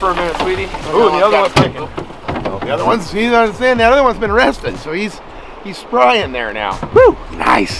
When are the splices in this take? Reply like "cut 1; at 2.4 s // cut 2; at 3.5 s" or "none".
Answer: none